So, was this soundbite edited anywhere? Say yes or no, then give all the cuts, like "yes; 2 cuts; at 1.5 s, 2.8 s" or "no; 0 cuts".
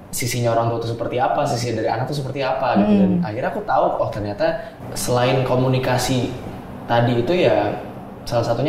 yes; 1 cut; at 4.7 s